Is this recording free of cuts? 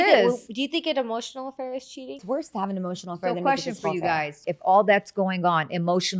no; 2 cuts; at 2.2 s, 4.5 s

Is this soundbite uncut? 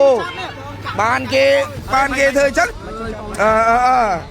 no; 1 cut; at 2.7 s

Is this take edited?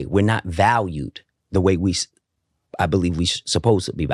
no; 0 cuts

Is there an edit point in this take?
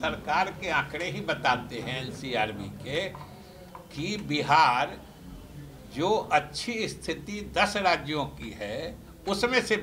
no; 0 cuts

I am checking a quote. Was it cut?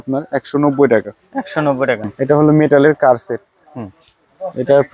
yes; 1 cut; at 2.1 s

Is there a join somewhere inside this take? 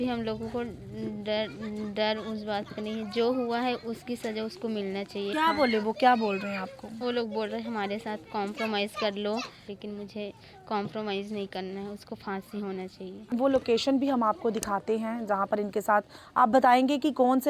yes; 2 cuts; at 9.6 s, 13.3 s

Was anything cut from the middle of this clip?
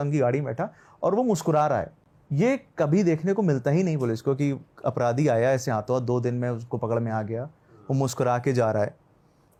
no; 0 cuts

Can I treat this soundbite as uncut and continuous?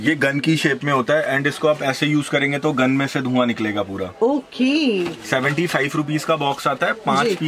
yes; 0 cuts

